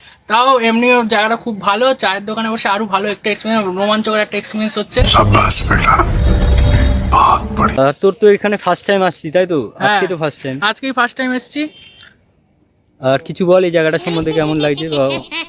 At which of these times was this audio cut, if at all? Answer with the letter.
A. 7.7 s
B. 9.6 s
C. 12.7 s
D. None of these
A